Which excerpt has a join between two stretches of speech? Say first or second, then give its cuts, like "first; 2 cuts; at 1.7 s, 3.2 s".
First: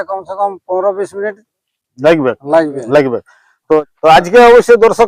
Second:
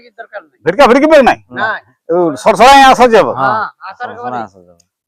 first; 1 cut; at 3.8 s